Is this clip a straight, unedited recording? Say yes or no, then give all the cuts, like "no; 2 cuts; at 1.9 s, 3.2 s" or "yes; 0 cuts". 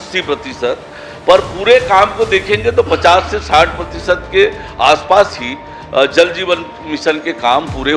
yes; 0 cuts